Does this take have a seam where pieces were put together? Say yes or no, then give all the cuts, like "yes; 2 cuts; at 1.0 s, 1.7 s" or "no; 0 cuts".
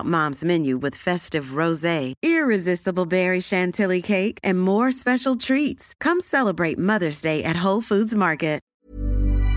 yes; 1 cut; at 8.7 s